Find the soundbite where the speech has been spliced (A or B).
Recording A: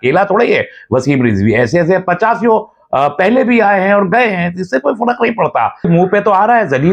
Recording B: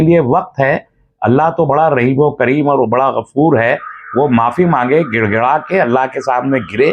A